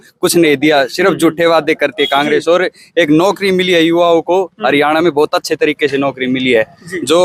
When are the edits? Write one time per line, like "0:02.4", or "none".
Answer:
none